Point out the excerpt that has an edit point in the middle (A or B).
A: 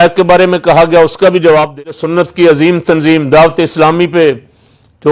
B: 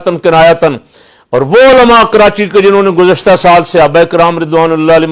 A